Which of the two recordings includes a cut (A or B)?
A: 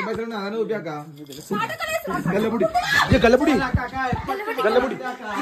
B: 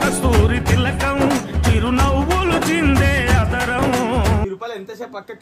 B